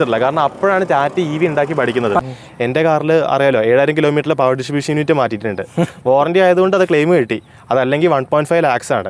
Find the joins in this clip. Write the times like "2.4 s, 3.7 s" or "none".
2.2 s